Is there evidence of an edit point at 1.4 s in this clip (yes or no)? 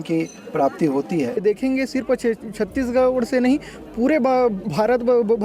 yes